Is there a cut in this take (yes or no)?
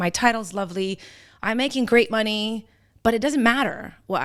no